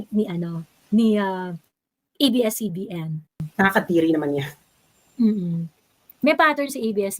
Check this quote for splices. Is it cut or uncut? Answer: cut